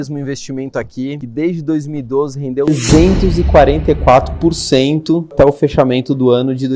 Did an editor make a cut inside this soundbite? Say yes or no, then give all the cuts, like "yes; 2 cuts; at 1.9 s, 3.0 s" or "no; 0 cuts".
yes; 2 cuts; at 1.2 s, 2.7 s